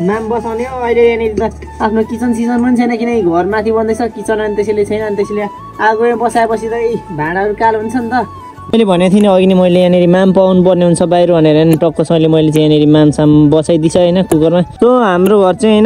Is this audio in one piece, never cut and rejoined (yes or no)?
no